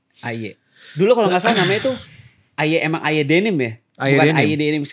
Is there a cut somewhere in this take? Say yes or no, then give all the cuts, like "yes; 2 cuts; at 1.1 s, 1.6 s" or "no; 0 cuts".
no; 0 cuts